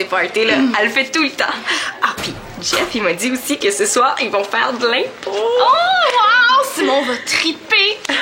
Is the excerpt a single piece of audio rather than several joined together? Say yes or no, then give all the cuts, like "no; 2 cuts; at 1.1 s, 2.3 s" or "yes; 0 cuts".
yes; 0 cuts